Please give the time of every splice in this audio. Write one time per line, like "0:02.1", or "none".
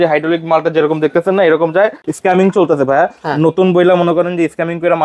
0:02.0